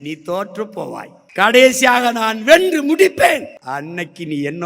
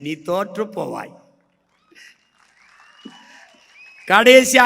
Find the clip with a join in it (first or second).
first